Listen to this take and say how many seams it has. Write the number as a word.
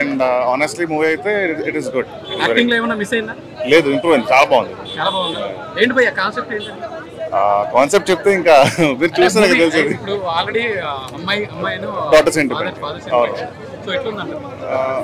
zero